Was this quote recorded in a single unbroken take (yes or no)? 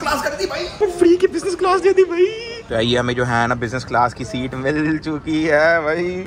no